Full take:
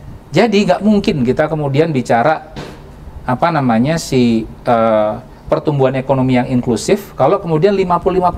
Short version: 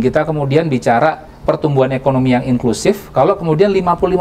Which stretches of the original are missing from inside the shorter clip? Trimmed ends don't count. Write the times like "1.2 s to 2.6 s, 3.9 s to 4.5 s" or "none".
2.5 s to 5.3 s